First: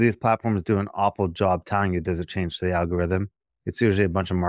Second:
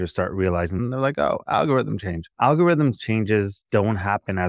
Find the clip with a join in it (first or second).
second